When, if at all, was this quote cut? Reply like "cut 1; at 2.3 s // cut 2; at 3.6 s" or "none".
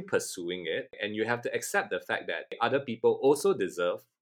cut 1; at 1.0 s // cut 2; at 2.6 s